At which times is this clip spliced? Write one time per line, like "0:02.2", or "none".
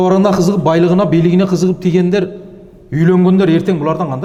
none